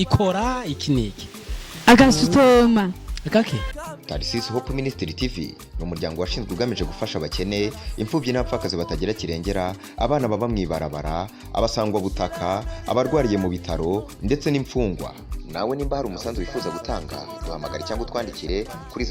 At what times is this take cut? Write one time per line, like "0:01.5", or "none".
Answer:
0:03.7